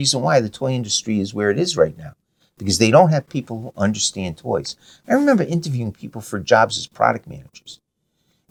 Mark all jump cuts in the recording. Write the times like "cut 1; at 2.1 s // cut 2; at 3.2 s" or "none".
none